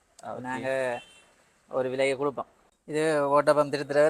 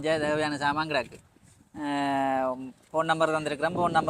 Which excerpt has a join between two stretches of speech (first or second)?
first